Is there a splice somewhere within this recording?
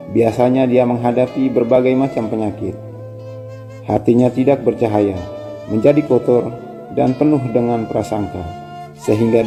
no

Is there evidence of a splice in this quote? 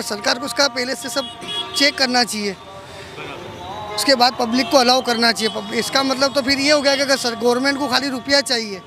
no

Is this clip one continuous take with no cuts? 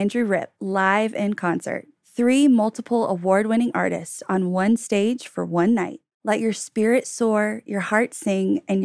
yes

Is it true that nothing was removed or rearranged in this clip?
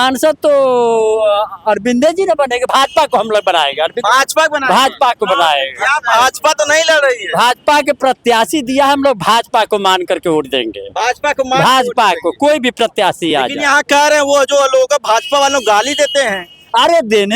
yes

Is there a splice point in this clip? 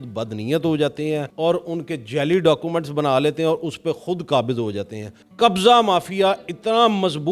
yes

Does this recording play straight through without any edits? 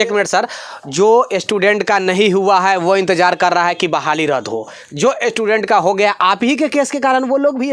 yes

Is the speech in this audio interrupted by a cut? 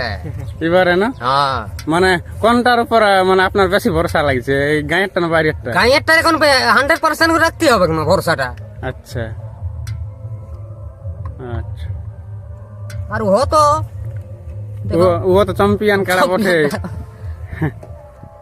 no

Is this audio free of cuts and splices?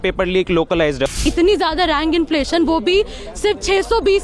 no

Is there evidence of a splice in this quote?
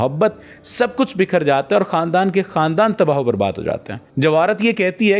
yes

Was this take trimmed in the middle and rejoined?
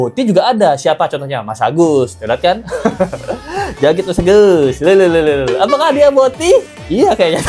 no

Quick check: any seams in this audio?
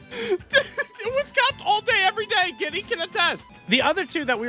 yes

